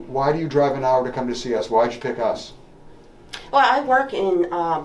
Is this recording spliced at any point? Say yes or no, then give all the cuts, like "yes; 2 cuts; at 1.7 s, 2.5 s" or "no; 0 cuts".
no; 0 cuts